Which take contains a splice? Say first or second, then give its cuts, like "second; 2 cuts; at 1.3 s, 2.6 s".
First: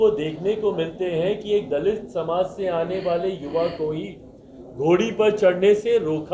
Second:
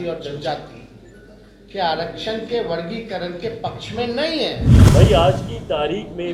second; 1 cut; at 4.7 s